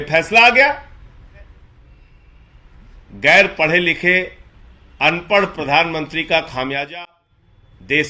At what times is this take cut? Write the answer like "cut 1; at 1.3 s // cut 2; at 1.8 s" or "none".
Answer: cut 1; at 2.1 s